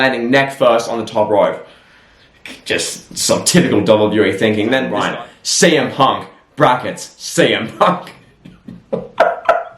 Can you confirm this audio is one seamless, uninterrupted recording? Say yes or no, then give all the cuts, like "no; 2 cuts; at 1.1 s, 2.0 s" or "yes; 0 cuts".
no; 1 cut; at 4.9 s